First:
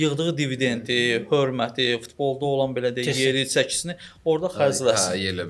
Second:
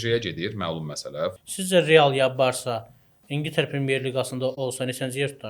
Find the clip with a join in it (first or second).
second